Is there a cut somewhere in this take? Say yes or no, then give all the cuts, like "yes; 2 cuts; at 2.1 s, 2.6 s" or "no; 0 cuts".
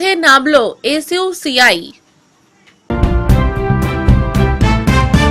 yes; 1 cut; at 2.9 s